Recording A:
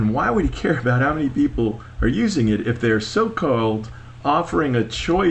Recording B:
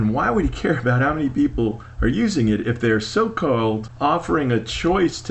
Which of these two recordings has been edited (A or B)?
B